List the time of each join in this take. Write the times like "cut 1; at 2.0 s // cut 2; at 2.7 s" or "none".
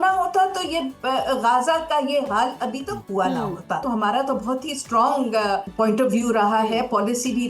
cut 1; at 3.8 s // cut 2; at 5.7 s